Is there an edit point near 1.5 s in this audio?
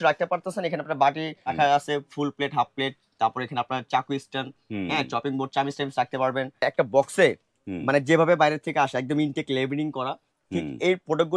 yes; 2 cuts; at 1.5 s, 6.6 s

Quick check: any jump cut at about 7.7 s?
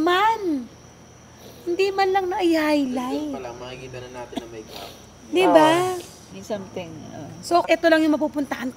yes; 1 cut; at 7.7 s

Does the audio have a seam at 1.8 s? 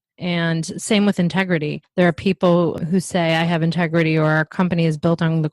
yes; 1 cut; at 1.8 s

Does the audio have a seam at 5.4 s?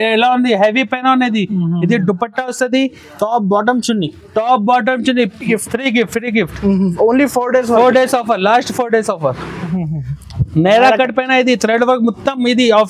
yes; 2 cuts; at 5.4 s, 9.5 s

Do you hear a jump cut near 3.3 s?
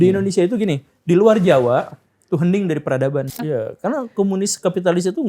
yes; 1 cut; at 3.3 s

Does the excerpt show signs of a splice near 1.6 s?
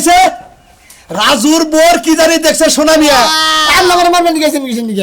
no; 1 cut; at 3.5 s

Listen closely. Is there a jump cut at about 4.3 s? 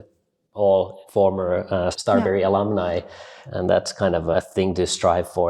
yes; 4 cuts; at 1.0 s, 2.0 s, 3.3 s, 4.3 s

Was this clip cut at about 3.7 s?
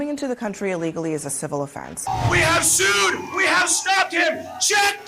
no; 1 cut; at 2.1 s

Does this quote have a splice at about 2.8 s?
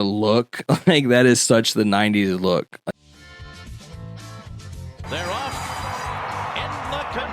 yes; 1 cut; at 2.8 s

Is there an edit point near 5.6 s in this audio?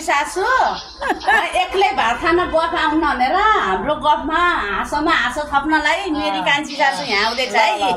no; 0 cuts

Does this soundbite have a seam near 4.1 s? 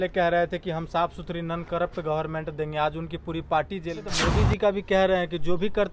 yes; 1 cut; at 4.1 s

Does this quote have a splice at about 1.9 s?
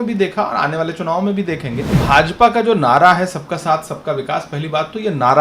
yes; 1 cut; at 1.9 s

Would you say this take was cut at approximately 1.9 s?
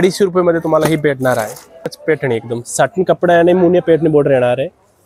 yes; 1 cut; at 1.9 s

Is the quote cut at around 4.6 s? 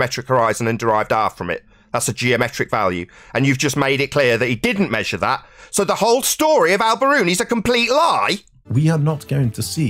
no; 1 cut; at 8.7 s

